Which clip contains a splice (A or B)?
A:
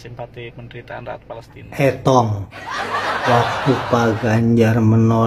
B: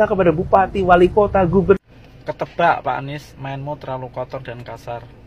A